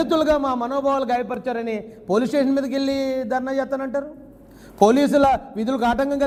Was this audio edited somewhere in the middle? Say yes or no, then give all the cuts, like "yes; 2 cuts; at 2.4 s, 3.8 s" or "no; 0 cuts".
no; 0 cuts